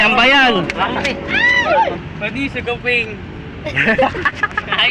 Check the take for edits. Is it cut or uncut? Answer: cut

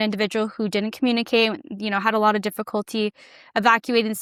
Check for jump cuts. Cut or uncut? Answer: uncut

